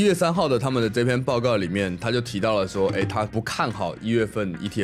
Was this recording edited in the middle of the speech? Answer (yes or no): no